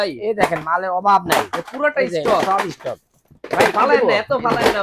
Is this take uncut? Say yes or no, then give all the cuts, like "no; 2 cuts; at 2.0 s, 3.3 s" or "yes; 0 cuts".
yes; 0 cuts